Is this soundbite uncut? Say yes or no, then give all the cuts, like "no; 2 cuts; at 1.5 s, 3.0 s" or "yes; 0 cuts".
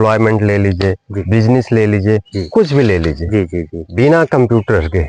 yes; 0 cuts